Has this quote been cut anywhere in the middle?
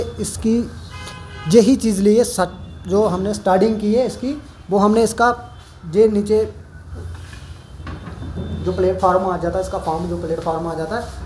no; 0 cuts

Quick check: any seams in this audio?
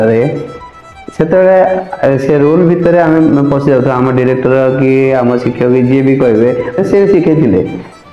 yes; 1 cut; at 6.8 s

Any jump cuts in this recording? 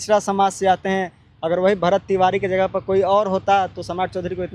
no; 0 cuts

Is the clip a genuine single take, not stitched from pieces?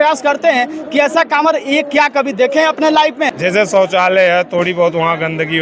no; 1 cut; at 3.3 s

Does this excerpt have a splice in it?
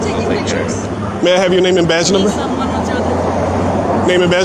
no; 0 cuts

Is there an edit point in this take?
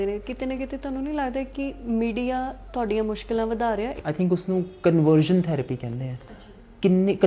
yes; 1 cut; at 3.9 s

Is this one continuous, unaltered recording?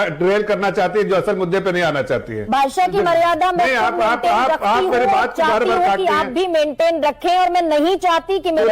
no; 1 cut; at 2.4 s

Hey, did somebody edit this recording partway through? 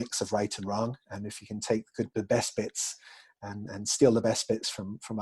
no; 0 cuts

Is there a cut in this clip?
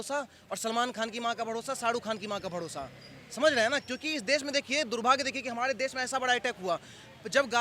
no; 0 cuts

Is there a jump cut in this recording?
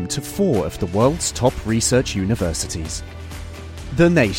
no; 0 cuts

